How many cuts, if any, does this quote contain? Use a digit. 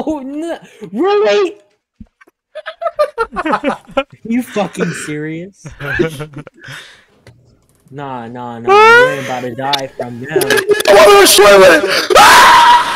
1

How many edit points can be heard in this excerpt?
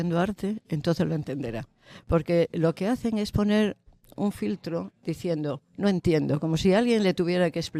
0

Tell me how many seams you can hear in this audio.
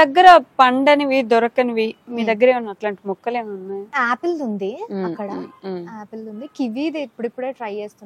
1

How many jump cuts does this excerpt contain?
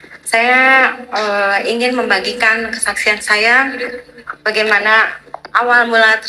0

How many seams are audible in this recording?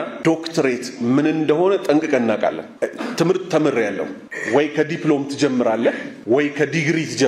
0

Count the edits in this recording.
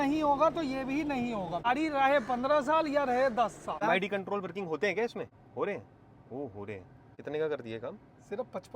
4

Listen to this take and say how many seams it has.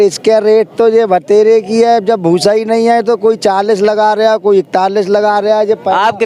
0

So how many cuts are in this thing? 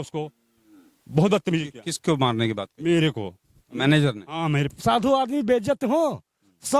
1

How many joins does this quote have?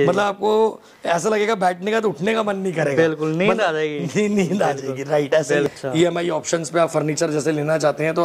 1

